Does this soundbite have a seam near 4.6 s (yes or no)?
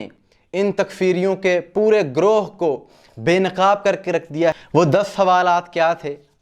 yes